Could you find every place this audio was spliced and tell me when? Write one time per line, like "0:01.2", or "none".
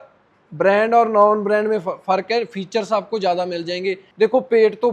0:04.0